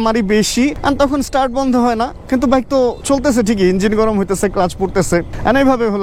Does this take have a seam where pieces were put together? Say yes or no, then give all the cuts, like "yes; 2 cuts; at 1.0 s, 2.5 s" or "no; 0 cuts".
no; 0 cuts